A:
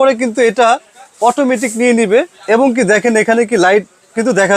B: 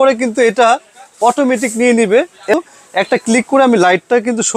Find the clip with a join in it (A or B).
B